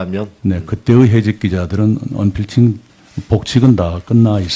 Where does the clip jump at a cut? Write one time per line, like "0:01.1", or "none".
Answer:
none